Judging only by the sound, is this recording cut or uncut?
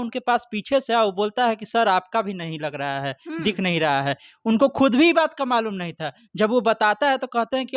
uncut